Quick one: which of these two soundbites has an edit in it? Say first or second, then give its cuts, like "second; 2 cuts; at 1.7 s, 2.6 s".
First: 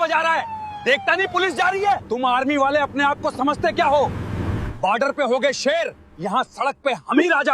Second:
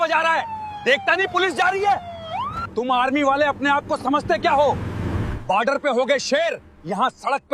first; 1 cut; at 2.0 s